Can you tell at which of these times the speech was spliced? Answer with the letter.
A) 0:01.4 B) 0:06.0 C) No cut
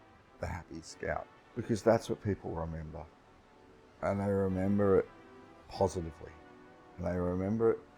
A